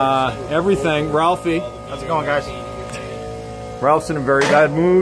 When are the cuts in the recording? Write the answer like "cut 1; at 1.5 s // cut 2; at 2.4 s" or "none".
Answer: cut 1; at 1.8 s